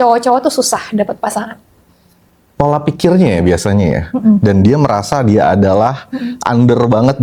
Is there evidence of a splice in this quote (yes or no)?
no